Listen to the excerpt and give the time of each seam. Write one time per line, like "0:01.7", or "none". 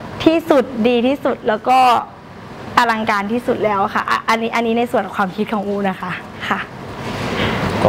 none